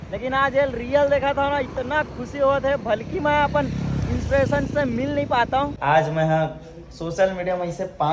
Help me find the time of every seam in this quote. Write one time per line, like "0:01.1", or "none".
0:05.7

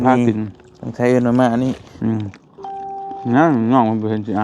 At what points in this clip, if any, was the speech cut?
0:01.9

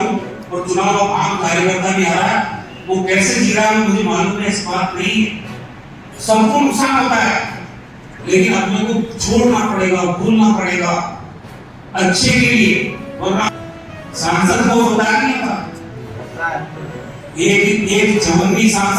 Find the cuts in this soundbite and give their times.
0:13.5

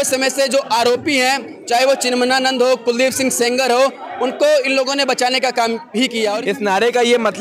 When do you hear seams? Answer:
0:06.3

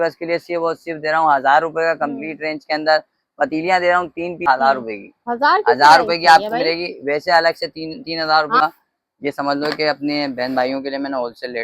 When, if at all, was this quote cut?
0:04.5
0:08.6

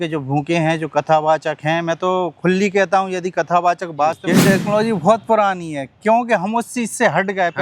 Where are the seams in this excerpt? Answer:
0:04.2

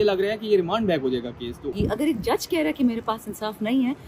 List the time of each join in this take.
0:01.7

